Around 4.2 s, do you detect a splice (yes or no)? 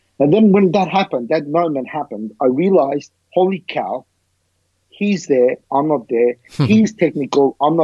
no